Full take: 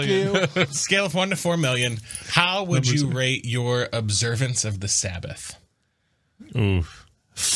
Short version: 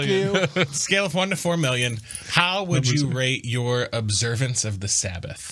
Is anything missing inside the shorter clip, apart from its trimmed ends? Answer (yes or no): no